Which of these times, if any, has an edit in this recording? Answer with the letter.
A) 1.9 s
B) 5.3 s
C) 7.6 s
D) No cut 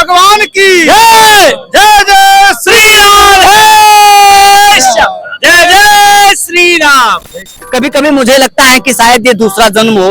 C